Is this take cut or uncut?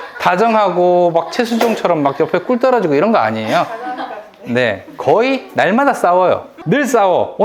cut